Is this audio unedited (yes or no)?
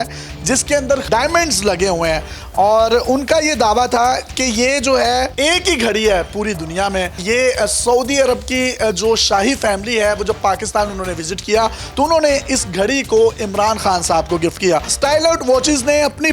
no